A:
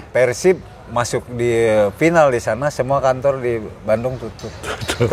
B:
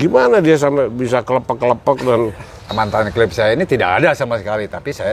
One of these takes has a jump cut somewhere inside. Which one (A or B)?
B